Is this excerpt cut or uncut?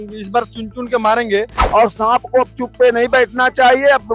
cut